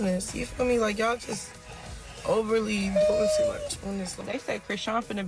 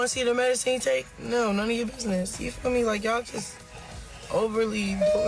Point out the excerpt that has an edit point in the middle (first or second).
first